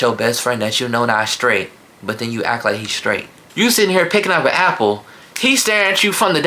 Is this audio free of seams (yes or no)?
no